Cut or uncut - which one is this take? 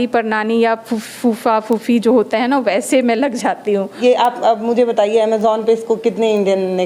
cut